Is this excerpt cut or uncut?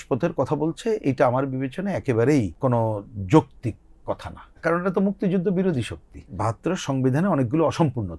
cut